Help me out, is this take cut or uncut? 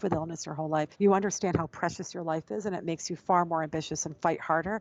cut